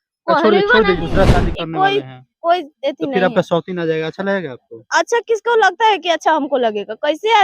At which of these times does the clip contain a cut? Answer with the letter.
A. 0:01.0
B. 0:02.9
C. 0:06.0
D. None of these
A